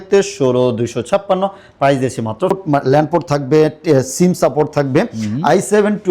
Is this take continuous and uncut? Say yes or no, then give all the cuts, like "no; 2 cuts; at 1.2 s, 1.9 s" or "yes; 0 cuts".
no; 1 cut; at 2.6 s